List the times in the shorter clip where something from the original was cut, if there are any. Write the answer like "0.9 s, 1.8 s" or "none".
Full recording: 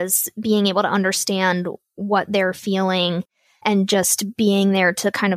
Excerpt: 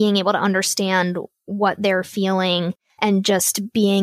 2.8 s